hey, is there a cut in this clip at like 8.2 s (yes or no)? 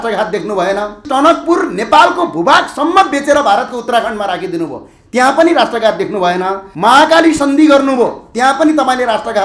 no